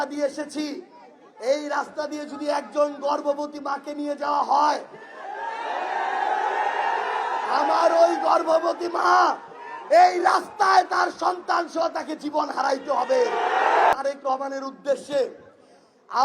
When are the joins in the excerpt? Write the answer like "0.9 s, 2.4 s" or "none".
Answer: 13.9 s